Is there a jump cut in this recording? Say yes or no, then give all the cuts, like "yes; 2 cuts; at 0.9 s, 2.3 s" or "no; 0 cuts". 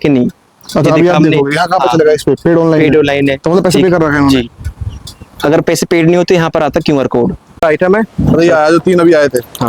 yes; 1 cut; at 7.5 s